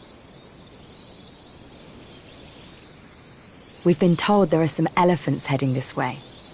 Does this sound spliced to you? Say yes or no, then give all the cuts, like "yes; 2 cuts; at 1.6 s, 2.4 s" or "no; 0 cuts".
no; 0 cuts